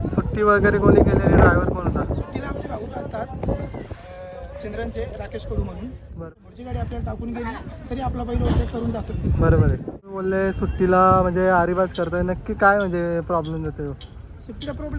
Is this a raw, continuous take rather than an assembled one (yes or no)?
no